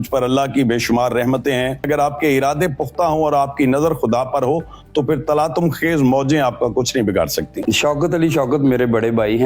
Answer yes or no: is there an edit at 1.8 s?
yes